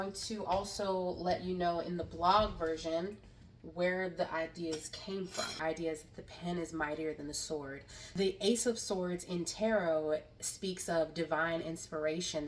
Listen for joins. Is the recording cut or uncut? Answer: cut